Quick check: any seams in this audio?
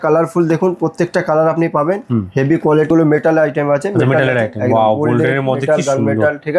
yes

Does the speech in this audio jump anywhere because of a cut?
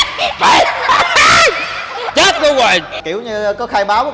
yes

